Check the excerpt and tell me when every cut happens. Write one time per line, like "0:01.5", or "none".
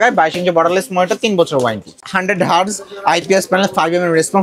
0:02.0

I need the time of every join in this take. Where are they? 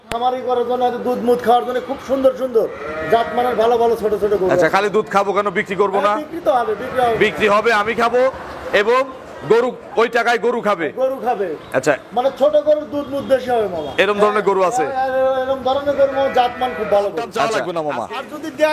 0:17.5

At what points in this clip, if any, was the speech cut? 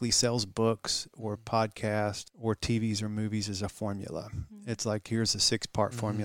0:02.3

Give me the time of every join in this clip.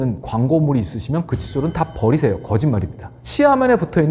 none

